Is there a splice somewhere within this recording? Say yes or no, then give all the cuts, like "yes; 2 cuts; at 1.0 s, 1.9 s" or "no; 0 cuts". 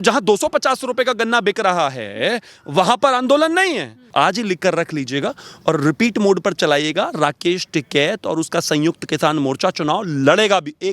yes; 1 cut; at 4.1 s